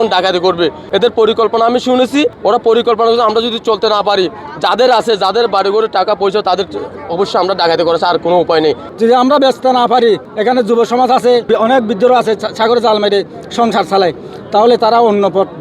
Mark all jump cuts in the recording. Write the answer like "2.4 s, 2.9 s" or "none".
2.3 s, 8.9 s, 10.3 s, 11.5 s